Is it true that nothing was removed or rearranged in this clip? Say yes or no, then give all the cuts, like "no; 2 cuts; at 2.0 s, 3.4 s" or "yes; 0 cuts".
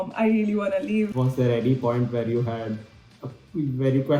no; 1 cut; at 1.1 s